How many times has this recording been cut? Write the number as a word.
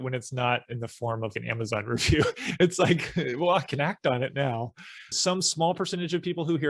one